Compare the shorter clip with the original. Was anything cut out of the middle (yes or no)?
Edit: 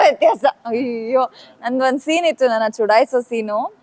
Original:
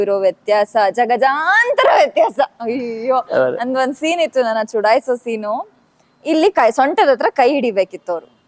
no